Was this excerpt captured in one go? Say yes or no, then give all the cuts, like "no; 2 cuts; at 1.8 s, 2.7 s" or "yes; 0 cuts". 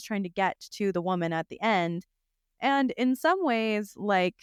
yes; 0 cuts